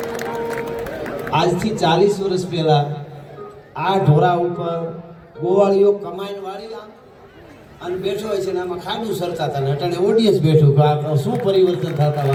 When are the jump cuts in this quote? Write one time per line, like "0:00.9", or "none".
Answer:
none